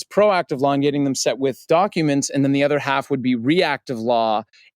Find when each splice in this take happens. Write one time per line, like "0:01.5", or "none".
0:01.6